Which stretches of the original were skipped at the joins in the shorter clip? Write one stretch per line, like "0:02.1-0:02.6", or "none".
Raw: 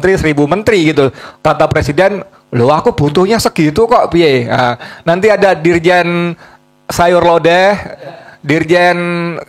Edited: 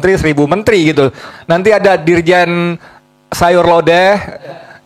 0:01.3-0:04.9